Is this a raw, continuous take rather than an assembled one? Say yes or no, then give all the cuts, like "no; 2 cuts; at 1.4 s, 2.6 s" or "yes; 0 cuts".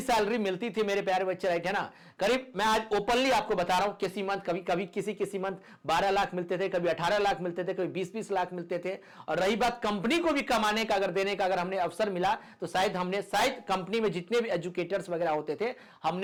yes; 0 cuts